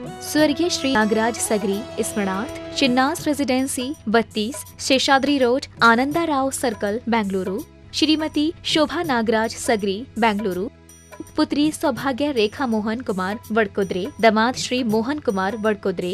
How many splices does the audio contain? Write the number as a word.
one